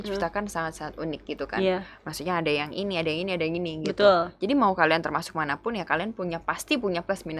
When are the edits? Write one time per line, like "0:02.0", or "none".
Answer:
none